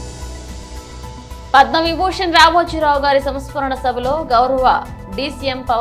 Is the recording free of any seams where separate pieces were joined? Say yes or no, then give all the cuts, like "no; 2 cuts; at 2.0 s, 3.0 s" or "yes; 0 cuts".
no; 1 cut; at 1.4 s